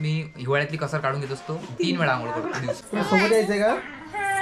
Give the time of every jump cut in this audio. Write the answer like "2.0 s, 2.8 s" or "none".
2.8 s